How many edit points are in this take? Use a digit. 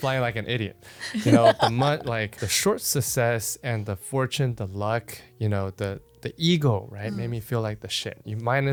0